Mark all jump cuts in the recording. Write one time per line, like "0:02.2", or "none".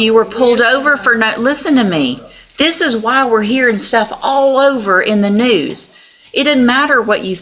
none

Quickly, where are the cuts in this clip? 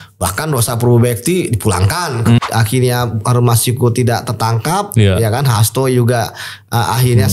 0:02.4

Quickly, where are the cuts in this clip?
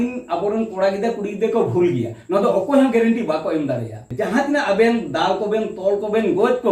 0:04.1

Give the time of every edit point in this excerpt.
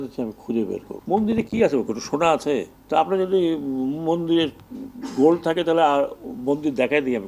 0:00.9
0:02.8

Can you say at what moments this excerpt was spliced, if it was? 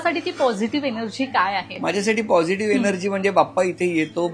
0:01.7

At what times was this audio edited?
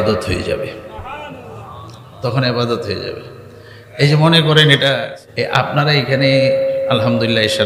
0:05.0

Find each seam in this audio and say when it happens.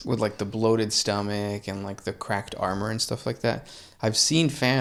none

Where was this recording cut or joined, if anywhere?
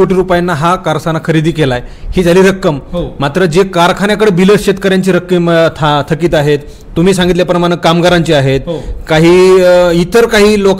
none

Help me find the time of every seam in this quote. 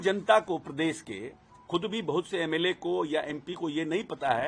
none

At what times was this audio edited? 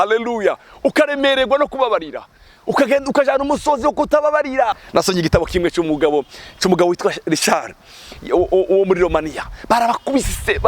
0:04.8

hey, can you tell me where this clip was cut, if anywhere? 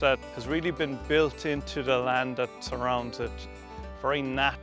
none

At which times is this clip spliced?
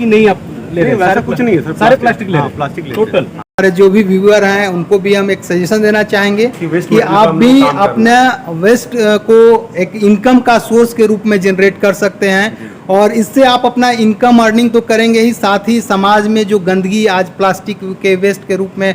0:03.5

